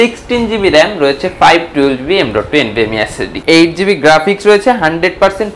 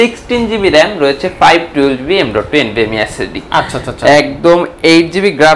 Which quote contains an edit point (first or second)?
first